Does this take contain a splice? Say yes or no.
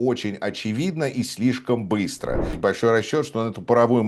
yes